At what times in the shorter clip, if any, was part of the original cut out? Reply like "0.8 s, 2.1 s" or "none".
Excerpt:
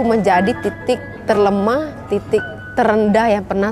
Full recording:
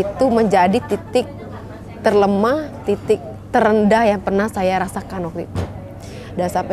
1.1 s